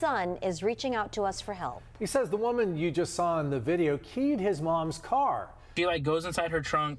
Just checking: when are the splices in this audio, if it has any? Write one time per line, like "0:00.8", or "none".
0:05.6